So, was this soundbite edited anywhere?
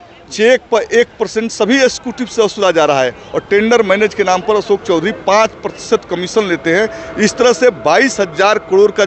no; 0 cuts

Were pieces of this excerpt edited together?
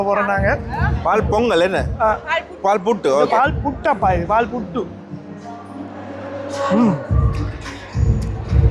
no; 0 cuts

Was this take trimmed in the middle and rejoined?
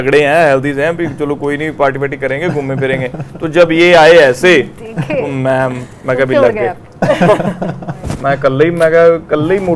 no; 0 cuts

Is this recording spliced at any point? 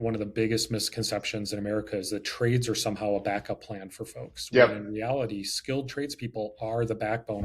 no; 0 cuts

